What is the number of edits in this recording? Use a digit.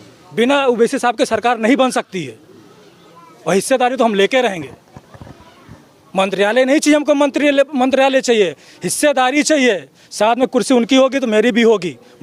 0